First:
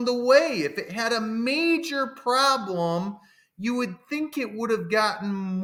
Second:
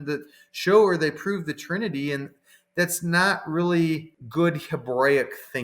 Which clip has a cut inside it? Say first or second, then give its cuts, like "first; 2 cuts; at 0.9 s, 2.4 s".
second; 1 cut; at 4.2 s